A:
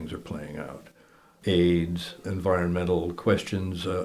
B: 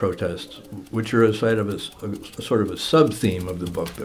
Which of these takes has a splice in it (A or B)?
A